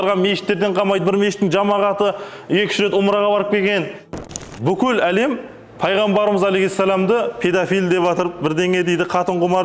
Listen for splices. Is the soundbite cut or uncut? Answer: cut